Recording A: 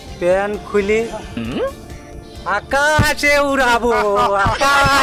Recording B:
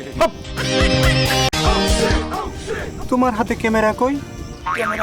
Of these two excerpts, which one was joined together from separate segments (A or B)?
B